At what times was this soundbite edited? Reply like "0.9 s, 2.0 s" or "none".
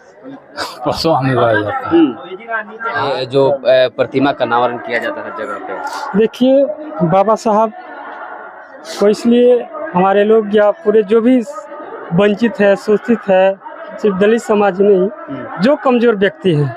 3.1 s

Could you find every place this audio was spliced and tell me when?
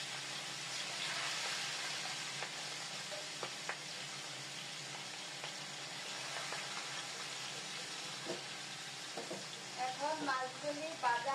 none

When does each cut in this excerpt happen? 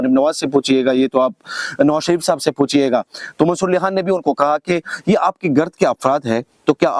none

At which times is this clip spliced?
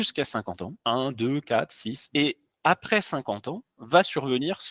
2.0 s

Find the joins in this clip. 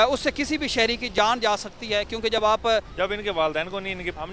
2.9 s

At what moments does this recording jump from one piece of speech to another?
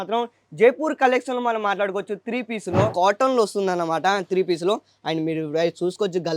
2.9 s

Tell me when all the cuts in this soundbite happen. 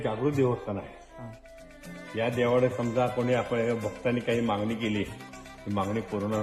none

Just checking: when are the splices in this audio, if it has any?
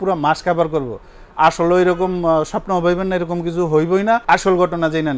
4.2 s

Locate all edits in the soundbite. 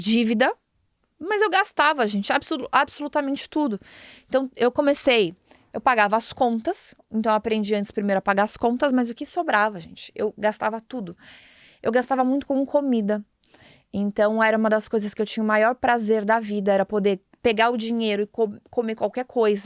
none

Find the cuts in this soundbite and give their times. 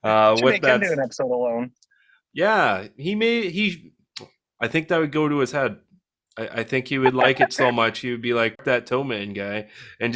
8.6 s

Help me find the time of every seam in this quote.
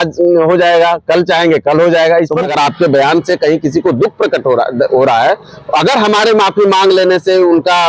2.5 s

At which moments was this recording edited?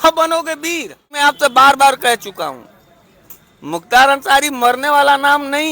1.1 s

